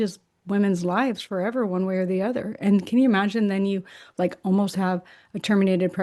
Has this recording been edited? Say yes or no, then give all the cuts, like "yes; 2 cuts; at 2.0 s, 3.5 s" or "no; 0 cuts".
no; 0 cuts